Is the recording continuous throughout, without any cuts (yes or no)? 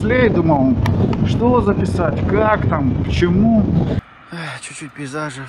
no